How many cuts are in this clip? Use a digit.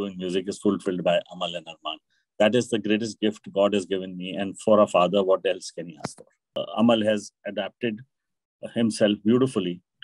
1